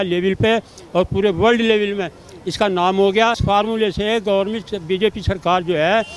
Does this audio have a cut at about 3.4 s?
yes; 1 cut; at 3.4 s

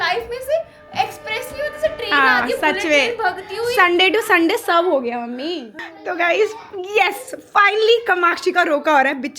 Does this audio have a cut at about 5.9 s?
yes; 1 cut; at 5.9 s

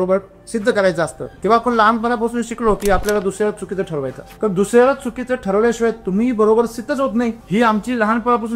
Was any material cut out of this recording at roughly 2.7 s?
no; 3 cuts; at 1.2 s, 4.2 s, 7.4 s

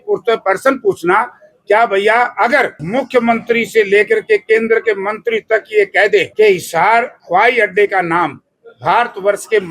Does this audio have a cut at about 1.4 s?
no; 3 cuts; at 2.8 s, 6.3 s, 7.2 s

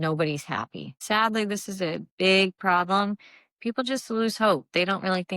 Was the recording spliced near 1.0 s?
yes; 1 cut; at 1.0 s

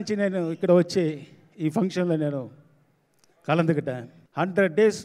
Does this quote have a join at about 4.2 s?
yes; 1 cut; at 4.2 s

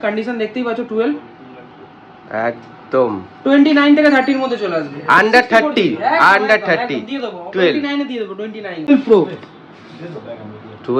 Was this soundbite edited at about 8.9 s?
yes; 1 cut; at 8.9 s

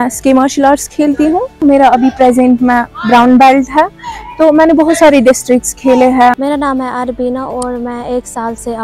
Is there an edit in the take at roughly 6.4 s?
yes; 2 cuts; at 1.5 s, 6.4 s

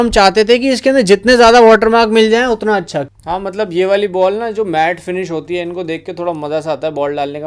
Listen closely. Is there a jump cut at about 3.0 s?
yes; 1 cut; at 3.0 s

